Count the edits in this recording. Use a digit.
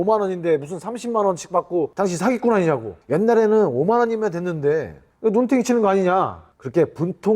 1